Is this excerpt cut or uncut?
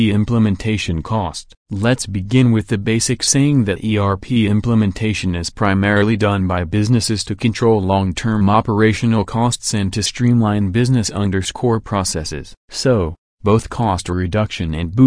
cut